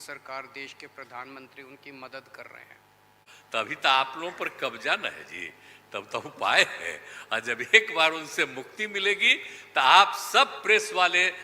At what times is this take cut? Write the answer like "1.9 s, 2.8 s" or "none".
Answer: 2.9 s